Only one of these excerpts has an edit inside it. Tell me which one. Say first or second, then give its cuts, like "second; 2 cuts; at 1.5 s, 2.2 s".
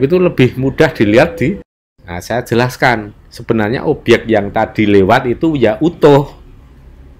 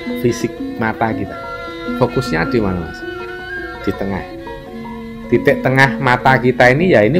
first; 1 cut; at 1.7 s